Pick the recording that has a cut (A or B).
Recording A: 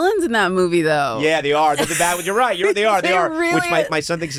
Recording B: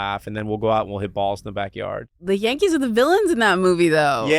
B